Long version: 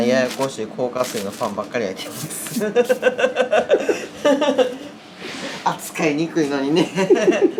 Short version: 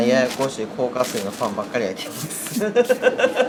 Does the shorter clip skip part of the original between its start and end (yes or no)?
no